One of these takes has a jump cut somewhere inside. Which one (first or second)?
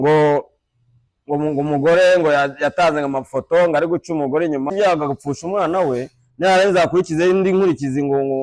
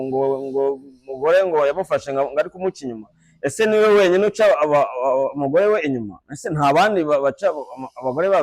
first